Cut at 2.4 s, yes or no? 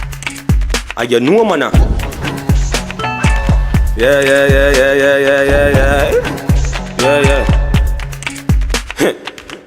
no